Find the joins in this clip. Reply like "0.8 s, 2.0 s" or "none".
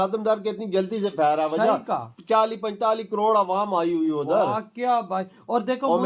none